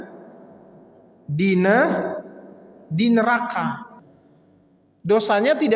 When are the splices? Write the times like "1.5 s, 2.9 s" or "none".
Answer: 3.9 s